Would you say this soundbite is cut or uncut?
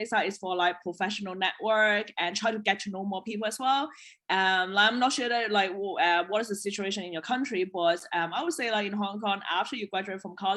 uncut